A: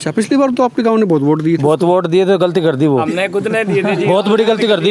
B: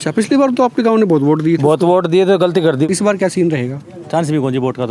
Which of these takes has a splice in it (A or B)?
B